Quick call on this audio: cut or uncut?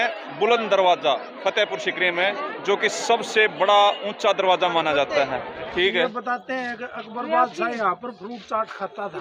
cut